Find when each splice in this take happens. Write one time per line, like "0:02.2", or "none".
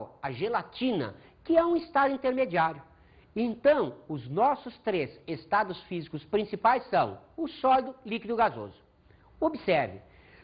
0:02.4